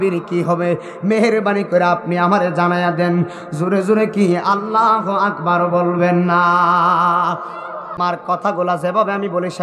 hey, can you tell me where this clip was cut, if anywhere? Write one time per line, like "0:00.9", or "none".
0:08.0